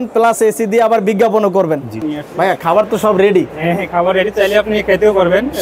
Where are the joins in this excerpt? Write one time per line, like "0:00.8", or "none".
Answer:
0:02.0